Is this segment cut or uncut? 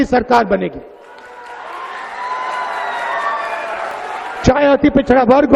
cut